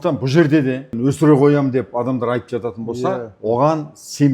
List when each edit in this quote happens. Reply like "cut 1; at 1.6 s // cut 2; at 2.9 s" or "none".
cut 1; at 0.9 s